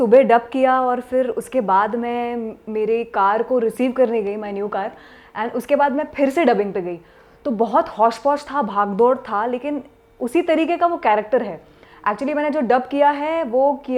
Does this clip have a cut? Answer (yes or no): no